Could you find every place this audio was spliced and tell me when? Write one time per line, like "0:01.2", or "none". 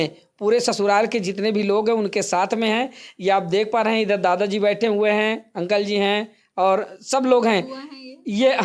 none

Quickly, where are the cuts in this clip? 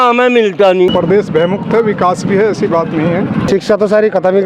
0:00.9
0:03.5

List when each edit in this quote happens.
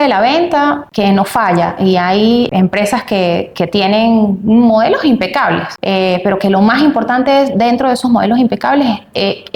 0:00.9
0:02.5
0:05.7

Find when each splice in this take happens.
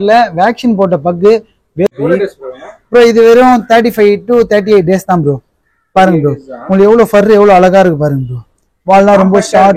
0:01.9

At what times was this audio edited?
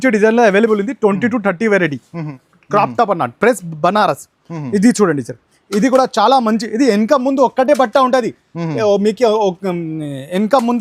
0:02.3

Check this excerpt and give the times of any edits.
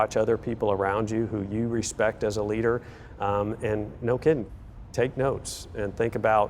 none

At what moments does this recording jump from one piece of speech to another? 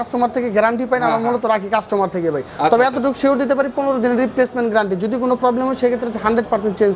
none

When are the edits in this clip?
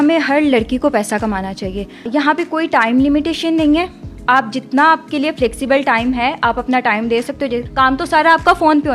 0:02.1
0:07.6

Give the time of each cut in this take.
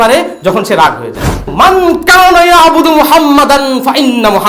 0:01.5

